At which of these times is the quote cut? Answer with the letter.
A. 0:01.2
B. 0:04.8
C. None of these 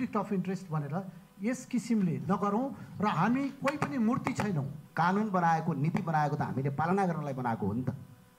B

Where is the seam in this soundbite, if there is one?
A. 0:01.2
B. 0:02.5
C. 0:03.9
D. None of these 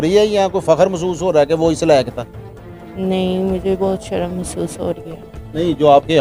D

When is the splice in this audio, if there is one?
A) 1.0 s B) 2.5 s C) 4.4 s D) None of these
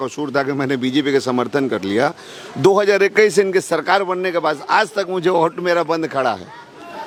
D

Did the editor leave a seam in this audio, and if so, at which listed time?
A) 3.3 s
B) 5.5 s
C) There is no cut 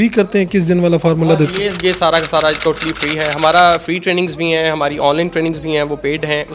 C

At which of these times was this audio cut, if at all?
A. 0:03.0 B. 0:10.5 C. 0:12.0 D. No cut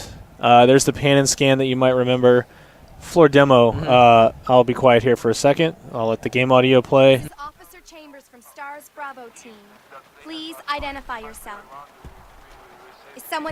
D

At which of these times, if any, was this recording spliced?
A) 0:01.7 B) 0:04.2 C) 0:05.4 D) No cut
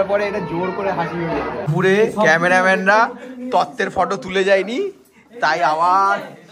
A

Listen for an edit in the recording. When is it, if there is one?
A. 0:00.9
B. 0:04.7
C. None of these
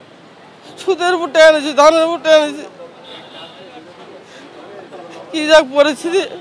C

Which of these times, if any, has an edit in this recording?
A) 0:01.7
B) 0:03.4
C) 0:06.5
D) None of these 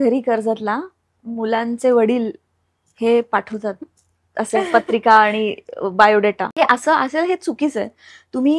C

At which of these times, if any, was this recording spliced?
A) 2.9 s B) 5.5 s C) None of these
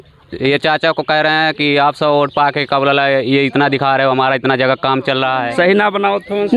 B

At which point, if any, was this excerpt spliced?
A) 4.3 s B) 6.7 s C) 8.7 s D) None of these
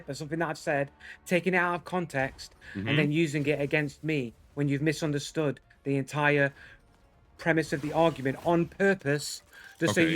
C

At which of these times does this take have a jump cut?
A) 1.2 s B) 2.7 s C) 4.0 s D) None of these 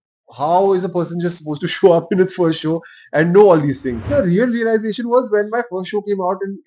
C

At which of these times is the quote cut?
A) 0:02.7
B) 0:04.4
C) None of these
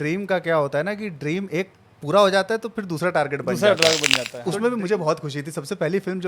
B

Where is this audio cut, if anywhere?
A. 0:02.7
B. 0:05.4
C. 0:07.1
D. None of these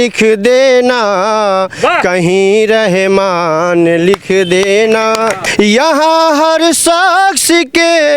B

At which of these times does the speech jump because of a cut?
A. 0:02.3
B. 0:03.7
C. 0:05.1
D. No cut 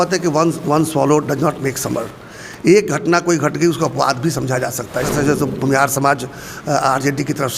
C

